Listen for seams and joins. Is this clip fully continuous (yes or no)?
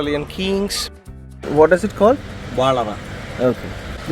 no